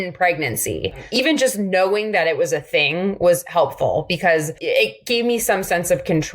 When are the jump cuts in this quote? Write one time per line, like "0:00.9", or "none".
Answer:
0:01.1
0:04.6